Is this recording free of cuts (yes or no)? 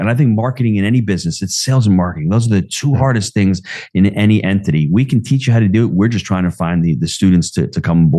yes